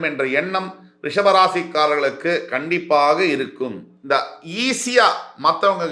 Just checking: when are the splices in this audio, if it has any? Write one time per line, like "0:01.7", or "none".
0:03.9